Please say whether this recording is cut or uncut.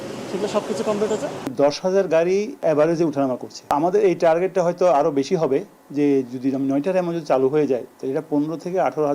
cut